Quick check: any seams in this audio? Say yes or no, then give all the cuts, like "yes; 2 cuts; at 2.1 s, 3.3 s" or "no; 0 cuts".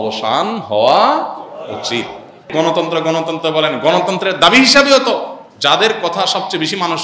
yes; 1 cut; at 2.5 s